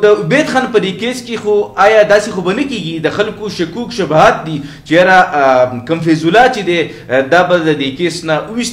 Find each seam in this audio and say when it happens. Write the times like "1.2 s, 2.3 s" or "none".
none